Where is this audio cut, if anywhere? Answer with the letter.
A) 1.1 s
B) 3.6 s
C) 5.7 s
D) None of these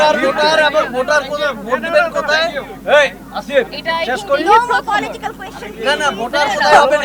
D